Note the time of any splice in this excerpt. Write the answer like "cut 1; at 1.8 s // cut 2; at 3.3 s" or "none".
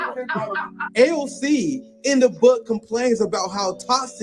cut 1; at 2.0 s